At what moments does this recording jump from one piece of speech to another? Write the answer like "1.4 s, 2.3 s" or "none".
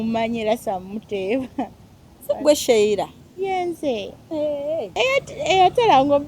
4.9 s